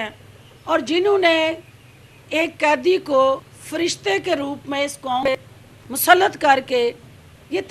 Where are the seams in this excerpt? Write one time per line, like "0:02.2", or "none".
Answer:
0:03.6
0:05.3